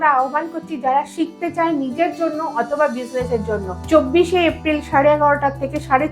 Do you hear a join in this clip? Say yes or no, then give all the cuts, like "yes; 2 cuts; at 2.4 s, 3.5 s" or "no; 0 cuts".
yes; 1 cut; at 3.7 s